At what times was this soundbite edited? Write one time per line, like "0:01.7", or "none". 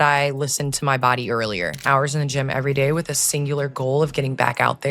0:01.8